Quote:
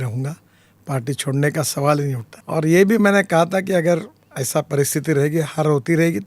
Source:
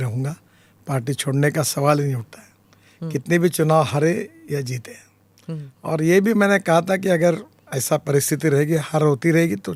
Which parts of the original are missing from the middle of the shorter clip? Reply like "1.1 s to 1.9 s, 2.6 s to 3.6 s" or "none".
2.3 s to 5.7 s